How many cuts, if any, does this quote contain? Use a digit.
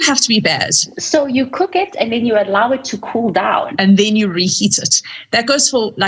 2